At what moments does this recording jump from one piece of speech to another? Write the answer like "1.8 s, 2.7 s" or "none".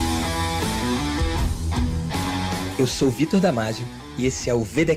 none